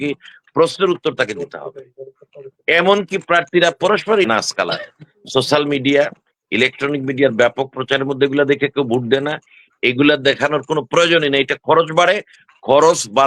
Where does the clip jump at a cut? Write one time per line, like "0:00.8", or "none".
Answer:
0:04.3